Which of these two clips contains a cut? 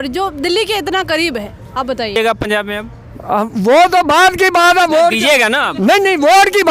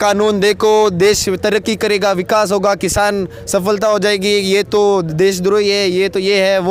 first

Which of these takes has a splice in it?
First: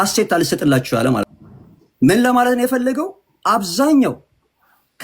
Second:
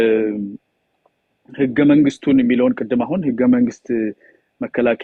first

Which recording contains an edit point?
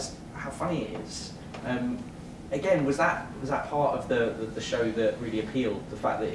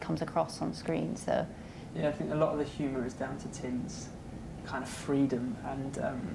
second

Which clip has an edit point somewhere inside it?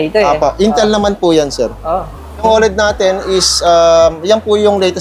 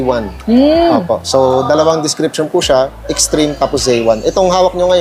first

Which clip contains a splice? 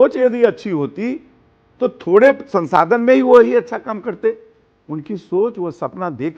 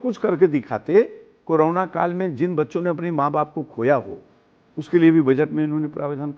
second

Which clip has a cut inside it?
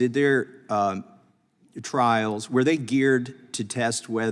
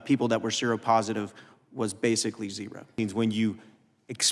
second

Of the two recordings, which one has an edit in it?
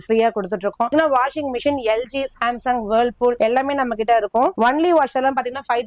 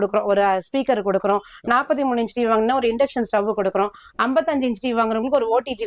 first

